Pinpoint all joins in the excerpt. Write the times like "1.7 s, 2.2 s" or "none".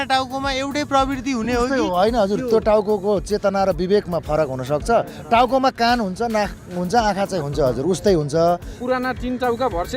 8.8 s